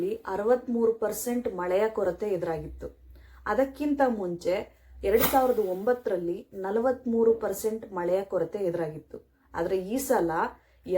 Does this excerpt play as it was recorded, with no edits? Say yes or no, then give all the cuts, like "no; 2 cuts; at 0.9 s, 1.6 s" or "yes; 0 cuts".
yes; 0 cuts